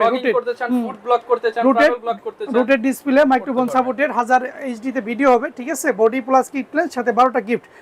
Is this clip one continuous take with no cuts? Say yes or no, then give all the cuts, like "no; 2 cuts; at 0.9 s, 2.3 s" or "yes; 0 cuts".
yes; 0 cuts